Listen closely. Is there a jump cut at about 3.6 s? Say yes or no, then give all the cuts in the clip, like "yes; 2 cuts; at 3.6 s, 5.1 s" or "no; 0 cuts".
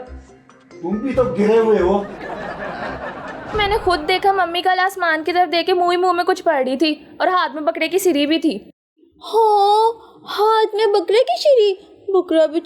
yes; 1 cut; at 3.6 s